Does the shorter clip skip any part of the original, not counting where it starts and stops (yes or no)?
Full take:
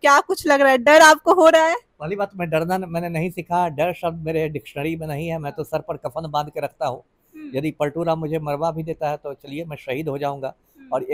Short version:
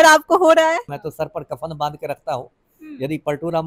yes